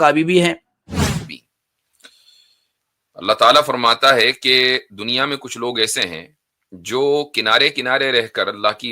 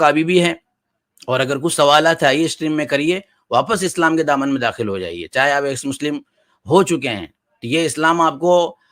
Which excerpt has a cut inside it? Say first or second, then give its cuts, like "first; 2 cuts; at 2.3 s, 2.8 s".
first; 1 cut; at 1.1 s